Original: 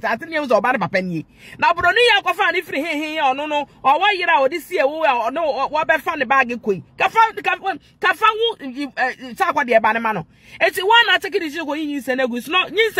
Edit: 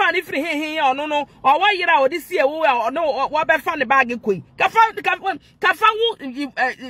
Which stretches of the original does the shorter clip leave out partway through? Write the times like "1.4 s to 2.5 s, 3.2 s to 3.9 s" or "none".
none